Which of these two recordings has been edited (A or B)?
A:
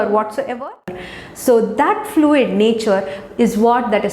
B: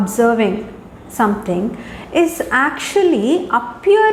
A